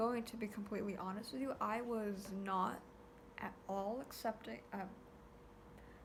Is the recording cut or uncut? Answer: uncut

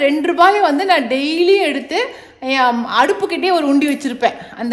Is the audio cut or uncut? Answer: uncut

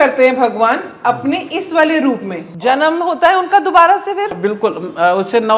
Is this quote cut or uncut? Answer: cut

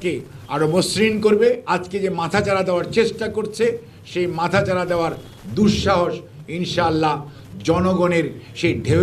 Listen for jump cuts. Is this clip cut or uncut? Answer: cut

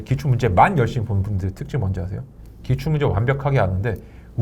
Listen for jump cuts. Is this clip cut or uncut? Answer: uncut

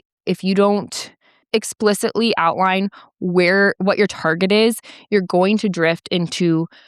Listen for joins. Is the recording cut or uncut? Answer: cut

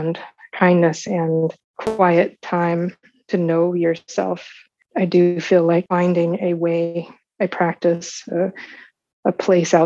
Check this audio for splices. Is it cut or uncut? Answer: cut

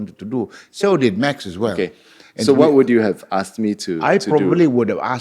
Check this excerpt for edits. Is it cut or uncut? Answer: uncut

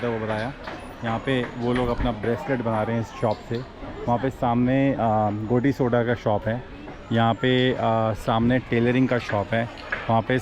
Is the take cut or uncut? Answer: uncut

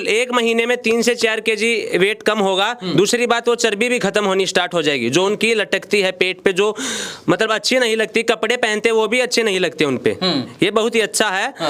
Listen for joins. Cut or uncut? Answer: uncut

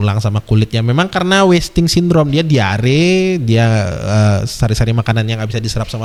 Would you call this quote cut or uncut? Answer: uncut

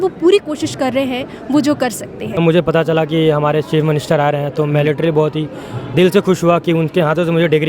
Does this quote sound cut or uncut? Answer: cut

